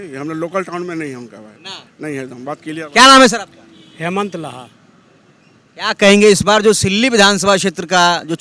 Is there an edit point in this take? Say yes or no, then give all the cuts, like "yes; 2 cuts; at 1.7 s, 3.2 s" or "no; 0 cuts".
no; 0 cuts